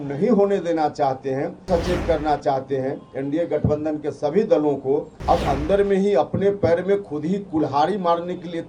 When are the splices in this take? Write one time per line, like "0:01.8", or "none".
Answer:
0:01.7
0:05.1